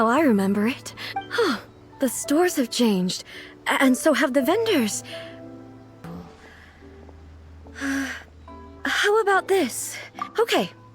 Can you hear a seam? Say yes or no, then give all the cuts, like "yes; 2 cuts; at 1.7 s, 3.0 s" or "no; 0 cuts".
yes; 1 cut; at 6.2 s